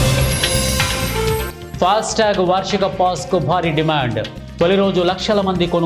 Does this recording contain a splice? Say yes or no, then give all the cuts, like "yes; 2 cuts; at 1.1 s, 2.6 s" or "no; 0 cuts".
yes; 1 cut; at 1.6 s